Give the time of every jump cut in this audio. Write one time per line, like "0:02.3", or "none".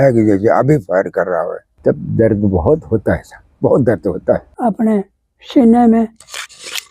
0:01.6
0:04.5